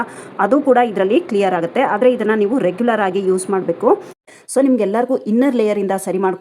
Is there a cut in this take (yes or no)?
yes